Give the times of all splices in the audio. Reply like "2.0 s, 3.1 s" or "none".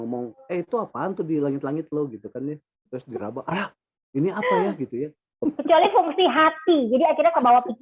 2.7 s, 5.4 s